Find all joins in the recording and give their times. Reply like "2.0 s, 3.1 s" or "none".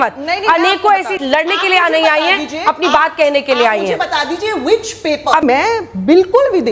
1.1 s, 5.4 s